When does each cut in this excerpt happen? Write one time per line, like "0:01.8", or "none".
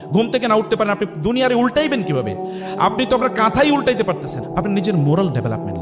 0:04.3